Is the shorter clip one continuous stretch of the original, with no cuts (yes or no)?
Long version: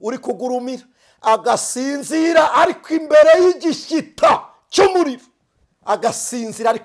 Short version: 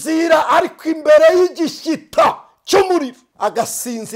no